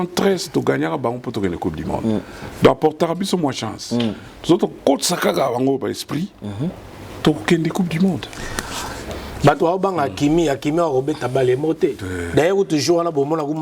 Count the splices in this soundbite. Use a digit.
0